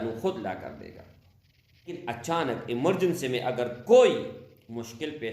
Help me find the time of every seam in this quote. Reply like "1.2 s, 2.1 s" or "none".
2.0 s